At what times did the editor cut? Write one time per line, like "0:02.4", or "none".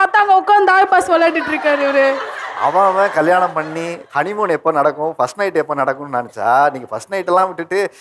none